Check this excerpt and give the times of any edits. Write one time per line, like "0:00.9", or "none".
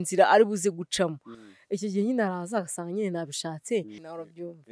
none